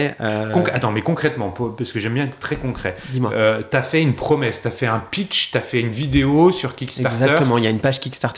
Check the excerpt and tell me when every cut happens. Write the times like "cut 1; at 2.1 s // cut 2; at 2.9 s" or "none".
none